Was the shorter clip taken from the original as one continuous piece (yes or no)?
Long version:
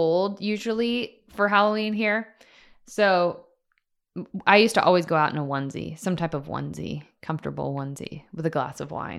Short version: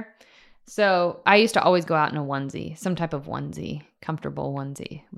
no